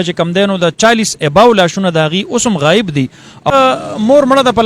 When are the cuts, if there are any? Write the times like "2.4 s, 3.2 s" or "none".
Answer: 3.5 s